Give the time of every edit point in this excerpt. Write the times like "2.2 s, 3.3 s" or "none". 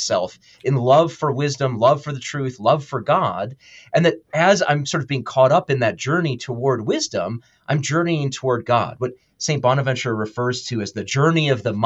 none